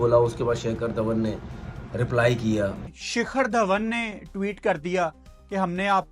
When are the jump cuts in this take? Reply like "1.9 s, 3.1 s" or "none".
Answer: 2.8 s, 5.2 s